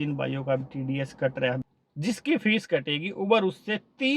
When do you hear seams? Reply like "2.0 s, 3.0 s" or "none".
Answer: 1.6 s